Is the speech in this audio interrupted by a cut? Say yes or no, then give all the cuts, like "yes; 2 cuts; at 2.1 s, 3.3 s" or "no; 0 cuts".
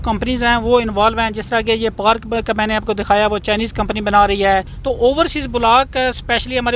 yes; 1 cut; at 4.7 s